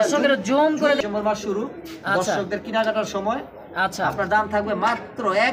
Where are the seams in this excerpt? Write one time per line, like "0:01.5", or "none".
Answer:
0:01.0

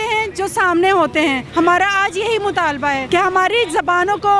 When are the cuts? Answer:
0:01.4
0:03.0

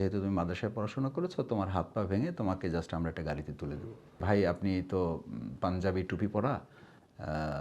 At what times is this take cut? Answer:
0:04.2

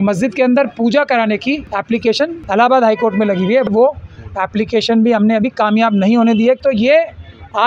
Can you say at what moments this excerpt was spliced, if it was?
0:02.0
0:03.7
0:06.6

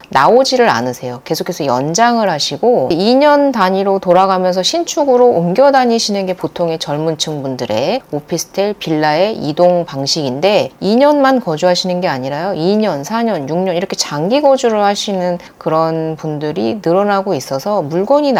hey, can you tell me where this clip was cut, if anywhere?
none

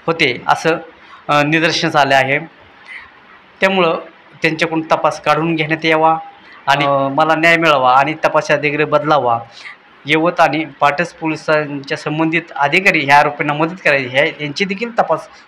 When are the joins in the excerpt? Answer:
0:06.8

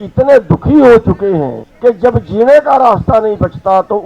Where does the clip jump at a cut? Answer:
0:01.6

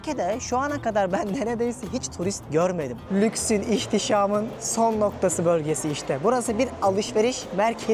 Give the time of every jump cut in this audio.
0:02.9
0:04.6

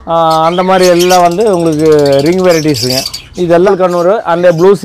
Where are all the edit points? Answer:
0:03.7

